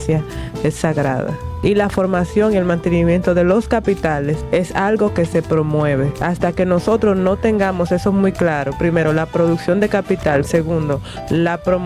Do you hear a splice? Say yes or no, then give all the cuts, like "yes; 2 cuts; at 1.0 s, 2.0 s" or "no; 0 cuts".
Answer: yes; 3 cuts; at 1.4 s, 4.4 s, 6.1 s